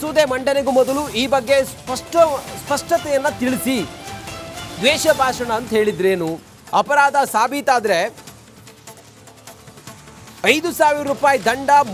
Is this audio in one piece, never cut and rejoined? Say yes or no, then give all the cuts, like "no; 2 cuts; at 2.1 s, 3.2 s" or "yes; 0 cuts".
yes; 0 cuts